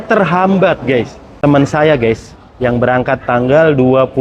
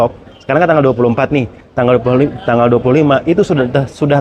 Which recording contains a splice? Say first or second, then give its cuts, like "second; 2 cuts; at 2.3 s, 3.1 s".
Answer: first; 1 cut; at 1.2 s